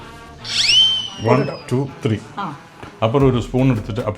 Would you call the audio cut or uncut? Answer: uncut